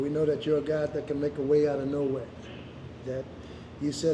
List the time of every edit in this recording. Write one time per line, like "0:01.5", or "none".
none